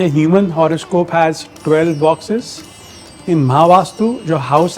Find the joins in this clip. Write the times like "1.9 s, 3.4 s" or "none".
none